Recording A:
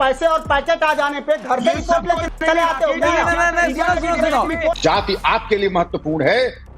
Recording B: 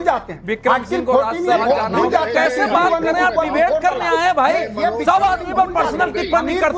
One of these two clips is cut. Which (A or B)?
A